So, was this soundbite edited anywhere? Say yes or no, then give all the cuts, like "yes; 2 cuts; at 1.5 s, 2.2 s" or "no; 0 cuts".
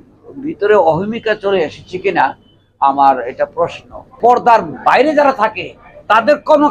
yes; 1 cut; at 4.1 s